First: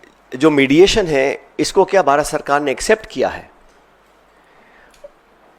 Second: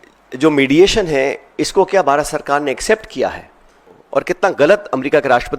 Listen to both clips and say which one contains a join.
second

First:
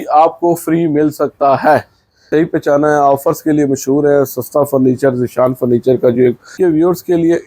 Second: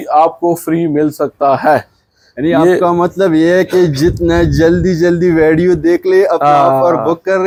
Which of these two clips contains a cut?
first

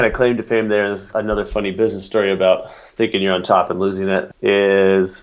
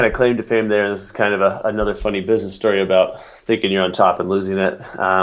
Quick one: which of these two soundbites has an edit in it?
first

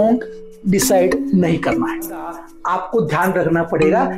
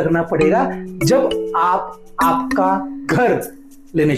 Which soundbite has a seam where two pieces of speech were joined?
first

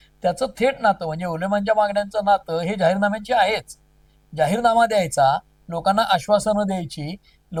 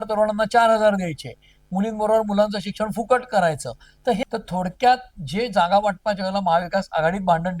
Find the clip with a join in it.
second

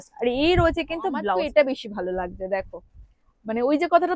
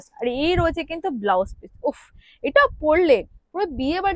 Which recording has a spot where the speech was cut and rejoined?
first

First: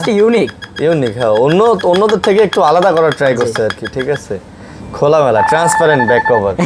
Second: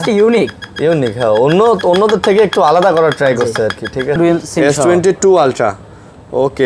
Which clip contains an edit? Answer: second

